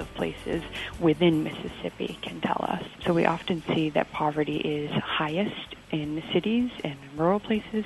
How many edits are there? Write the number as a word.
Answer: one